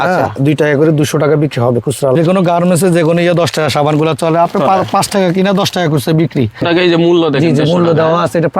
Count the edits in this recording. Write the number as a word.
two